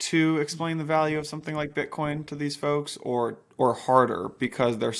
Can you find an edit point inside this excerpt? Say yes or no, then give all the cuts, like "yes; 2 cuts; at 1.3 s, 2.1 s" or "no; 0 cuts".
no; 0 cuts